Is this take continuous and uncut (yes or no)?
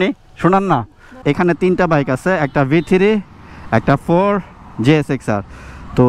no